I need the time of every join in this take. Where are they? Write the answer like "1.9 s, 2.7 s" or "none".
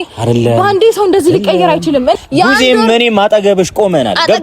2.2 s